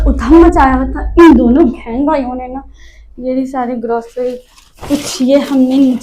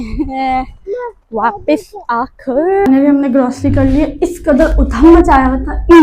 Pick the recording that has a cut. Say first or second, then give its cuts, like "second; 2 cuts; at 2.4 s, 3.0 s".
second; 1 cut; at 2.8 s